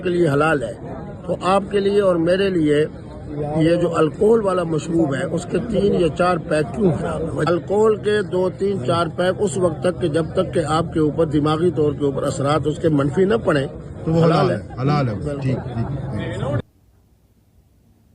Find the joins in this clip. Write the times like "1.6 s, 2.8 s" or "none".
7.5 s, 16.3 s

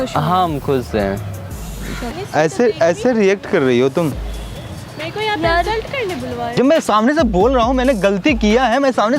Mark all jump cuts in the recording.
2.1 s, 6.5 s

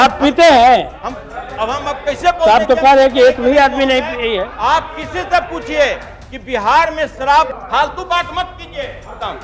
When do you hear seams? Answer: 7.5 s

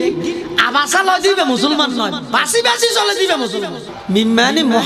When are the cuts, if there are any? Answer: 3.9 s

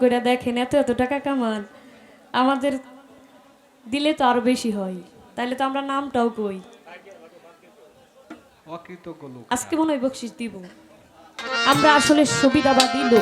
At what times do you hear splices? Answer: 11.4 s

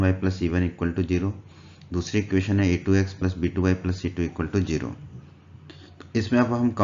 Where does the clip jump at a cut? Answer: 4.5 s

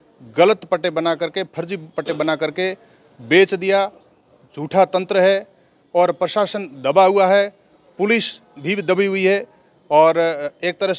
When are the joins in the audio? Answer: none

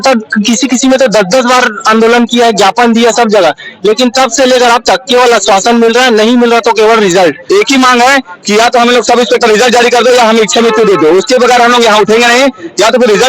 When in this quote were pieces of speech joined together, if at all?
7.4 s

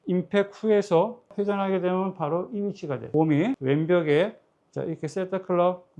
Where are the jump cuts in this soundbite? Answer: 1.3 s, 3.3 s

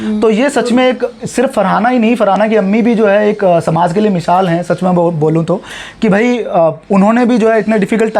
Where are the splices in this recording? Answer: none

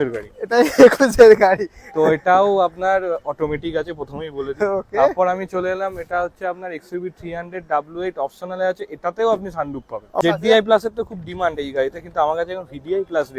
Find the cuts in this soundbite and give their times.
10.2 s

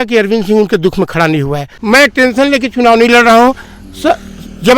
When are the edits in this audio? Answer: 1.7 s

